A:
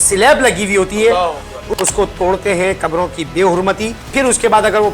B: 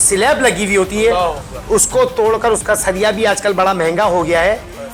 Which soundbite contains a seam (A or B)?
A